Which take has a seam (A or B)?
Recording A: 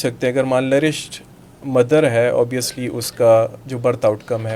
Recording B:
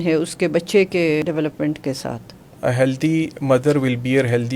B